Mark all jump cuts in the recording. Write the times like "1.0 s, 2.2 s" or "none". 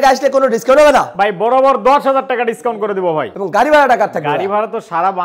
3.3 s